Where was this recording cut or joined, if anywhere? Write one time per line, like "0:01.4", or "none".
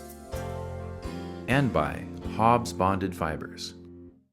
0:03.4